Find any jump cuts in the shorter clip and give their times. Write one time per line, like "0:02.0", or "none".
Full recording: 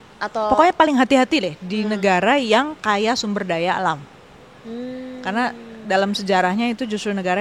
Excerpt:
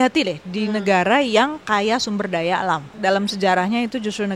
0:02.9